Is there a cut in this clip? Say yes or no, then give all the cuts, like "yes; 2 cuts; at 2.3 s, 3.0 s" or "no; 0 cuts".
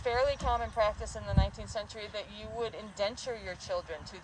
no; 0 cuts